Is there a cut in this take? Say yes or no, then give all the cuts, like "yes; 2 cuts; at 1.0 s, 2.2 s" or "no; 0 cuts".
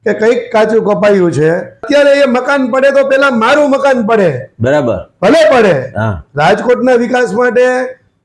yes; 1 cut; at 1.9 s